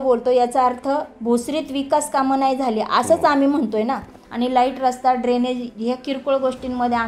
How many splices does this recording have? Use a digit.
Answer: 1